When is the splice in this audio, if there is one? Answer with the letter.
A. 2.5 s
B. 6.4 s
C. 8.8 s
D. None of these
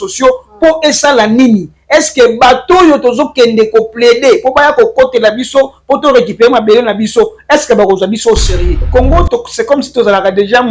C